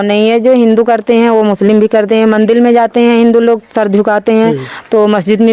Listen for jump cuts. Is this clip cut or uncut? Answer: uncut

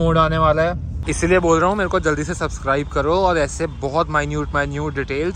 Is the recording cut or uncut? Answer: cut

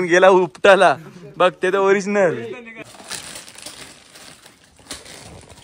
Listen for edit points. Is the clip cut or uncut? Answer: cut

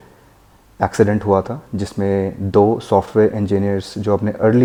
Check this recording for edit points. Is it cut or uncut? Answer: uncut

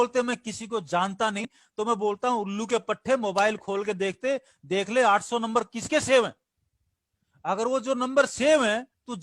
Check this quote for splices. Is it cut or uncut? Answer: cut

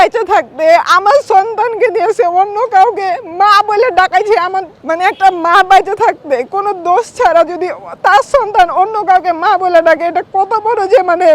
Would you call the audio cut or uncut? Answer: cut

